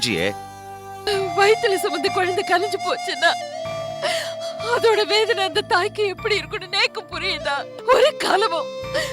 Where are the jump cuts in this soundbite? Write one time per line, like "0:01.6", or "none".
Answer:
0:01.0
0:07.7